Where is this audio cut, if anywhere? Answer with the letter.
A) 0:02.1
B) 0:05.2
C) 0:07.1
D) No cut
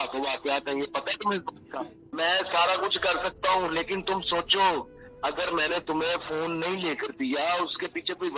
A